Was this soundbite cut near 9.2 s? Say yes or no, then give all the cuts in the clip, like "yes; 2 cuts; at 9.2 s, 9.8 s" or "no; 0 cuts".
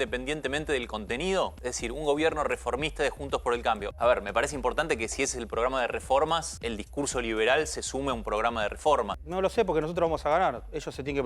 yes; 4 cuts; at 1.5 s, 3.9 s, 6.5 s, 9.2 s